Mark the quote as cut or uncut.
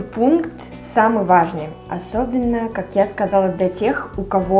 uncut